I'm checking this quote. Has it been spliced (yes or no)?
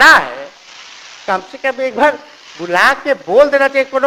no